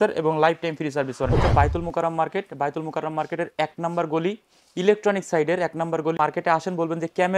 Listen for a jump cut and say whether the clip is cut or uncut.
cut